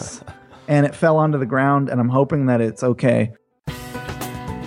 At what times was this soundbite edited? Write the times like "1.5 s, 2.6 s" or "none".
3.4 s